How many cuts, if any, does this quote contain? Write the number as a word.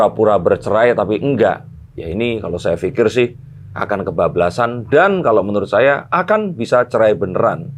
zero